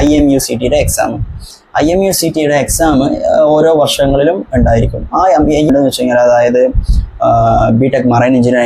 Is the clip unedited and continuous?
no; 1 cut; at 5.7 s

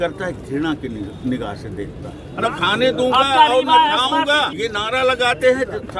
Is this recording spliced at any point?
yes; 2 cuts; at 2.2 s, 4.5 s

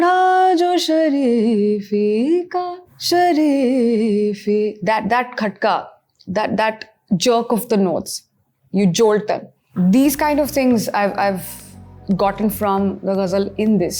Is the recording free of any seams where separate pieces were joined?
no; 1 cut; at 9.6 s

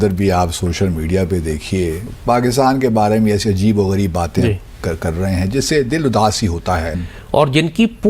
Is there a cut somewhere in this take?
yes; 2 cuts; at 2.1 s, 7.0 s

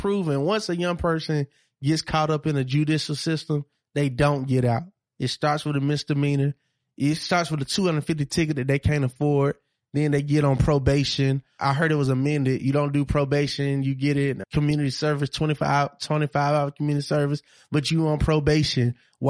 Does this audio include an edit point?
yes; 2 cuts; at 11.7 s, 14.4 s

